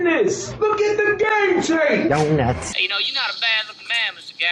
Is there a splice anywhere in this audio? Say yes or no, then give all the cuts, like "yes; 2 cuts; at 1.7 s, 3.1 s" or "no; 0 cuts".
no; 0 cuts